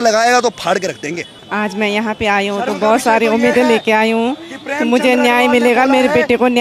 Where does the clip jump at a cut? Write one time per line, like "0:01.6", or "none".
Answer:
0:01.3